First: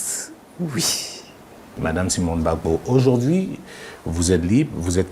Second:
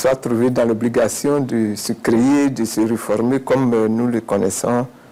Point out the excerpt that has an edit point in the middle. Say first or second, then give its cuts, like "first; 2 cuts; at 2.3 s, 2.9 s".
first; 1 cut; at 1.7 s